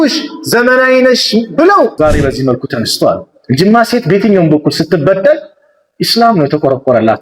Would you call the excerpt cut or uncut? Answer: cut